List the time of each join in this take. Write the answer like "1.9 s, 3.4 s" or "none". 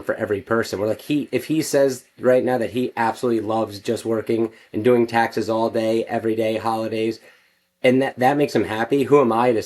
none